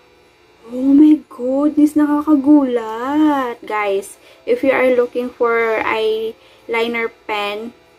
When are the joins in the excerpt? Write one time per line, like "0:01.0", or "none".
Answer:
none